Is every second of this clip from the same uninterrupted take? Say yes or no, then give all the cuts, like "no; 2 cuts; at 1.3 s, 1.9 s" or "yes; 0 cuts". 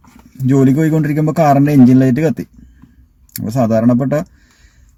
yes; 0 cuts